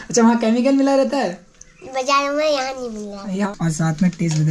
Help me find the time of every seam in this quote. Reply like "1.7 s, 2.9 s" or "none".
3.5 s

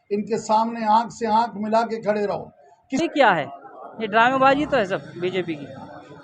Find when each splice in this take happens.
3.0 s

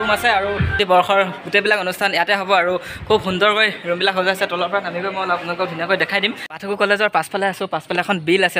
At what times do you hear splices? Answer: 0.8 s, 6.5 s

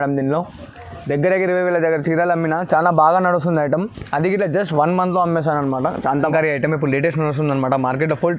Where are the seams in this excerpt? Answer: 6.3 s

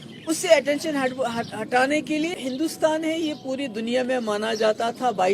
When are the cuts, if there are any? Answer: 2.4 s

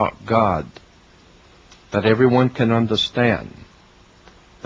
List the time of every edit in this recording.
1.6 s

